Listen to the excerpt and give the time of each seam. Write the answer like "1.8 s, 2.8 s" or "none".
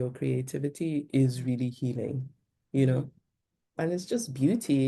3.7 s